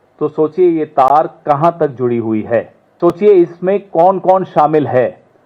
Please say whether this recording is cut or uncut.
cut